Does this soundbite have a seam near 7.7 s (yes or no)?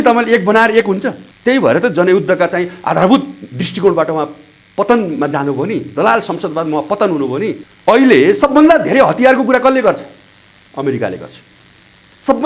yes